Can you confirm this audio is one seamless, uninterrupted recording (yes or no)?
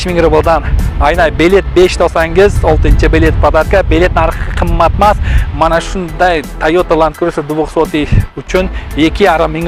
yes